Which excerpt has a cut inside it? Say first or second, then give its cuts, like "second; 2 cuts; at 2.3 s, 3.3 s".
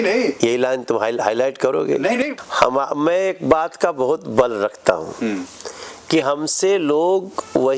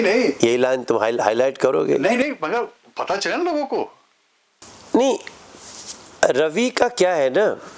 first; 1 cut; at 2.4 s